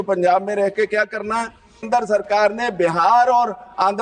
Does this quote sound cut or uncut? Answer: cut